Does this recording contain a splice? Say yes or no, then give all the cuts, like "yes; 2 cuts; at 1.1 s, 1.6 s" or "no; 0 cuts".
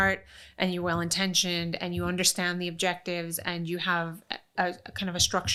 no; 0 cuts